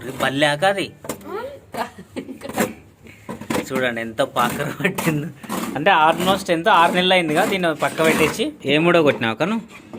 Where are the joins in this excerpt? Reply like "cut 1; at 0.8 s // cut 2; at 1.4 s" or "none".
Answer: cut 1; at 8.6 s